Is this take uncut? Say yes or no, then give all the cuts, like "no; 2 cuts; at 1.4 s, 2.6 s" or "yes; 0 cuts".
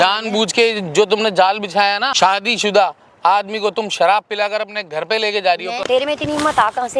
no; 2 cuts; at 2.1 s, 5.8 s